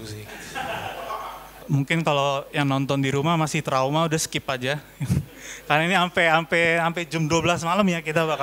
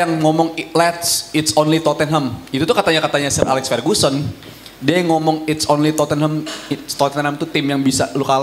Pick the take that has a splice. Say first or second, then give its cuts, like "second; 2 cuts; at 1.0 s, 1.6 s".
first; 1 cut; at 1.6 s